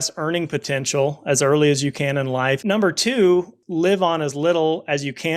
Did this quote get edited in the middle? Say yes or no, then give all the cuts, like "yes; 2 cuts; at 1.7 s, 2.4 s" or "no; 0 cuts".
yes; 2 cuts; at 2.6 s, 3.6 s